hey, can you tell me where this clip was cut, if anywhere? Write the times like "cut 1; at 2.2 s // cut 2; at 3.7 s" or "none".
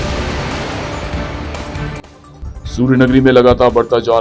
cut 1; at 2.2 s